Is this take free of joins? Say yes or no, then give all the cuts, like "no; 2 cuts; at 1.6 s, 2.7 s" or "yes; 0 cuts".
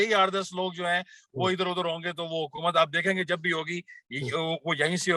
yes; 0 cuts